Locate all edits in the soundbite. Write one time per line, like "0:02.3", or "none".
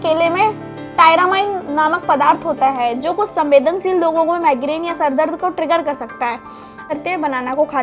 0:06.9

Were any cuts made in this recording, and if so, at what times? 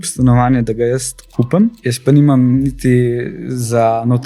0:01.9

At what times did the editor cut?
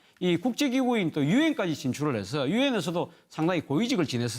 0:02.7

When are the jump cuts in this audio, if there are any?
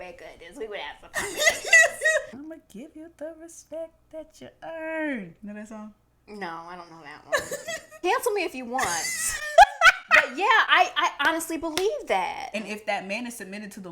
0:02.4
0:07.9
0:12.4

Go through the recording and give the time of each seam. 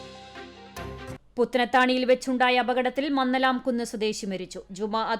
0:01.1

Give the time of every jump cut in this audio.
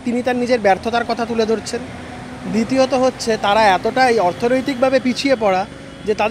none

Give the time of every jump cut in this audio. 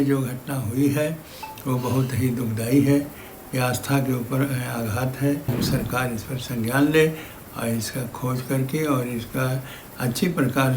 0:05.5

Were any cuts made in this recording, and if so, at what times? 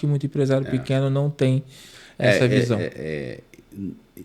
none

